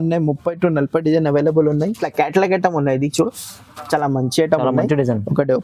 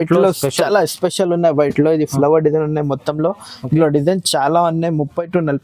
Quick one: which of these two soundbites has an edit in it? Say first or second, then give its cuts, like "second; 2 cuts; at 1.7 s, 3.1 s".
first; 1 cut; at 2.0 s